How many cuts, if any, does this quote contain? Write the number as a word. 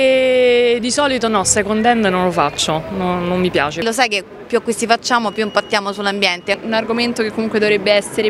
two